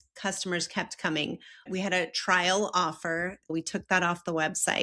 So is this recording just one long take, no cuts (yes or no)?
no